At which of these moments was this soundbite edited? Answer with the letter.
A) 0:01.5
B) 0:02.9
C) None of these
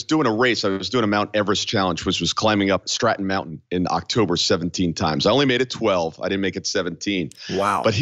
B